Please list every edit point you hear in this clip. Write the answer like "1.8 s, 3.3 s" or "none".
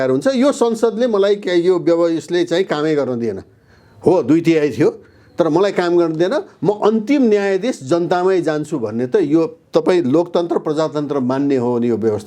none